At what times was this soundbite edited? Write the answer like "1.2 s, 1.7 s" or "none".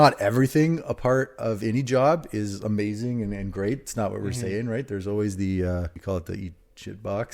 6.0 s